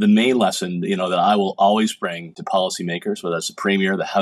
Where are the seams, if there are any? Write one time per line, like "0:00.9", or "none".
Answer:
0:02.4

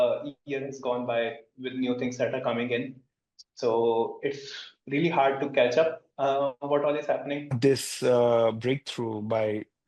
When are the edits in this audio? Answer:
0:07.5

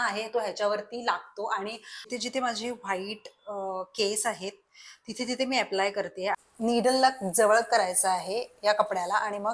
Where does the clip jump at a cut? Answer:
0:02.1
0:06.3

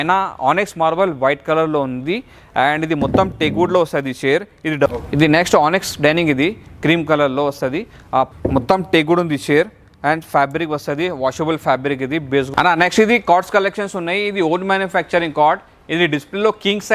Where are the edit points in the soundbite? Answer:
0:04.9
0:08.3
0:12.5

